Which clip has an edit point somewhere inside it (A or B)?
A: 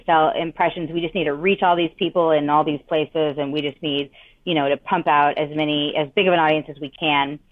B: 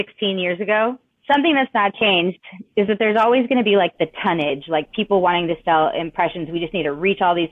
B